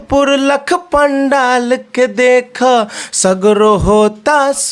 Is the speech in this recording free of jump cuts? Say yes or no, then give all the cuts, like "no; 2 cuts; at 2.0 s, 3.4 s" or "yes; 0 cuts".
yes; 0 cuts